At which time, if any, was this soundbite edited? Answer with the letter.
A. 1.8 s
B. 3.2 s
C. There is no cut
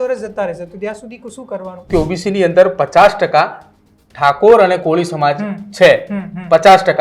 A